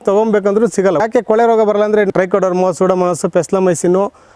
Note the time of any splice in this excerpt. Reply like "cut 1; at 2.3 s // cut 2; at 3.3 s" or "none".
cut 1; at 1.0 s // cut 2; at 2.1 s